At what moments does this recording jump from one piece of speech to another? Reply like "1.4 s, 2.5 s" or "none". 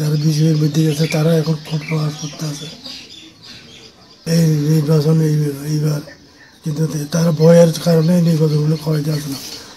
4.2 s

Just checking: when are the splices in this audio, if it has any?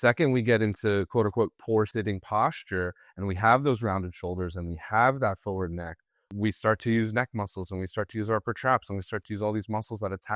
1.9 s, 6.3 s

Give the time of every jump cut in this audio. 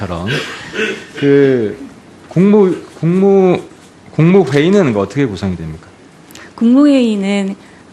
5.0 s

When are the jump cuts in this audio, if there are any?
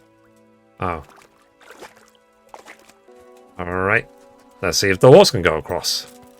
3.1 s

